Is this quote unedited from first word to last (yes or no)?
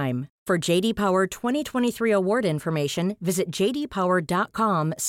yes